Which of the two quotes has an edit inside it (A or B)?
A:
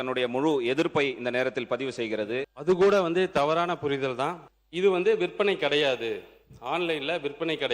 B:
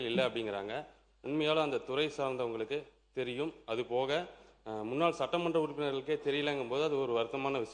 A